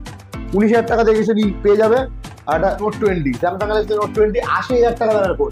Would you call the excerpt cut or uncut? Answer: cut